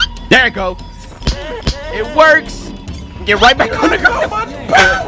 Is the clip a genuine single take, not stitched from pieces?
yes; 0 cuts

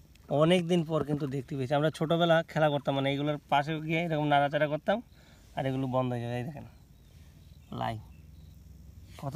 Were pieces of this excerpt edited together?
no; 0 cuts

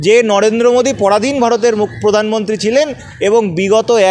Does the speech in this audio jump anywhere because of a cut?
no; 0 cuts

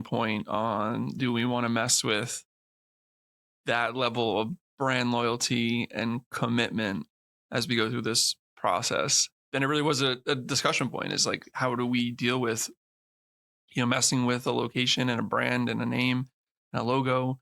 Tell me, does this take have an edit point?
yes; 1 cut; at 9.3 s

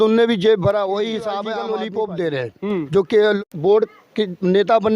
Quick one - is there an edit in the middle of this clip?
yes; 2 cuts; at 1.5 s, 3.4 s

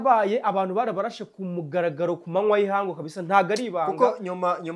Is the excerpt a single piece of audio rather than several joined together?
yes; 0 cuts

